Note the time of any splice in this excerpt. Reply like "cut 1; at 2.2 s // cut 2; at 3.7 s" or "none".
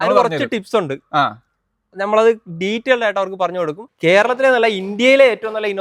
cut 1; at 3.8 s